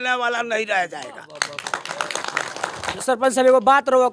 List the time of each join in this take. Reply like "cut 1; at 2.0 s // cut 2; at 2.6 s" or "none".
cut 1; at 3.0 s